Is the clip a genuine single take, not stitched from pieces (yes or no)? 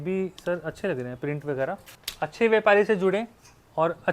no